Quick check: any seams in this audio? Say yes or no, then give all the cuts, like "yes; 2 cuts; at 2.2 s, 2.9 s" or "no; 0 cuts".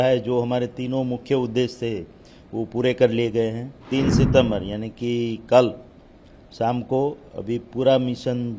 yes; 1 cut; at 3.8 s